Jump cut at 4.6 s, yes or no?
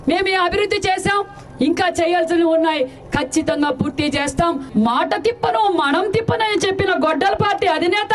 yes